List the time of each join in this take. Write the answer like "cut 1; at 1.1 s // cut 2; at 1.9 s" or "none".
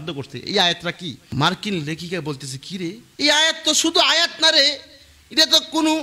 cut 1; at 1.2 s // cut 2; at 3.1 s